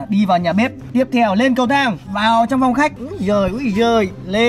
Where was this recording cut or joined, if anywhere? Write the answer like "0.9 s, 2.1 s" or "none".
3.0 s